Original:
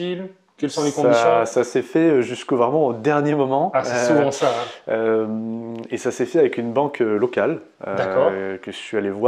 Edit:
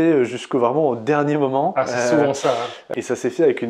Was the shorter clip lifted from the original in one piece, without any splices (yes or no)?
no